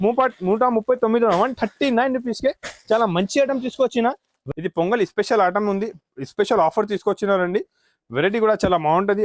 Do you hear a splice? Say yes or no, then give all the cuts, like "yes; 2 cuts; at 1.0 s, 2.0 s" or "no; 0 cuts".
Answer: yes; 1 cut; at 4.4 s